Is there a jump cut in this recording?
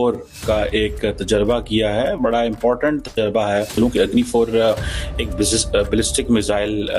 yes; 1 cut; at 3.7 s

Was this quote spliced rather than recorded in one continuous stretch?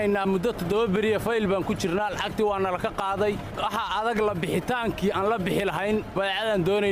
no; 0 cuts

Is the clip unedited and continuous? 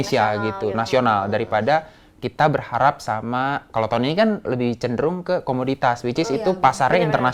yes; 0 cuts

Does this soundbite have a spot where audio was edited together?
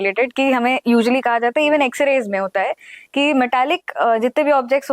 no; 0 cuts

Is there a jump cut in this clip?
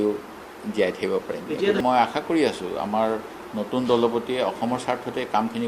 yes; 1 cut; at 1.8 s

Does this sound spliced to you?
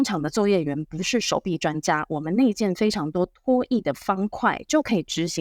no; 0 cuts

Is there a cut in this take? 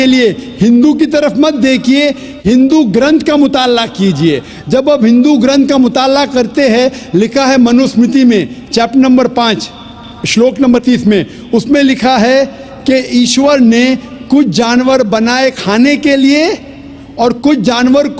no; 0 cuts

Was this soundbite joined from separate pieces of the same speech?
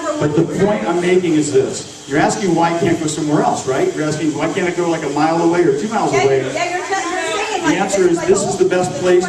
no; 0 cuts

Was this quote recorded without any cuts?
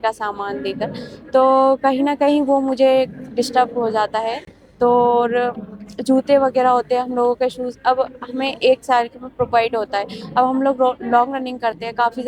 yes; 0 cuts

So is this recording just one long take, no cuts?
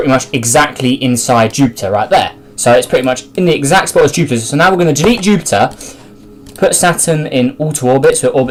yes; 0 cuts

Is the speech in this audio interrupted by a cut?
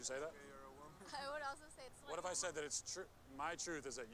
yes; 1 cut; at 1.9 s

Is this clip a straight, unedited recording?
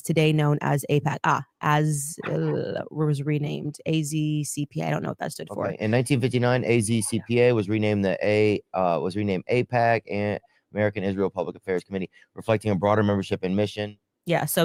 yes; 0 cuts

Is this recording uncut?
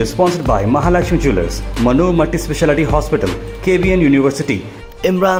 yes; 0 cuts

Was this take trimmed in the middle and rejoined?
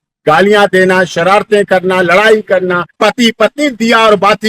yes; 1 cut; at 2.9 s

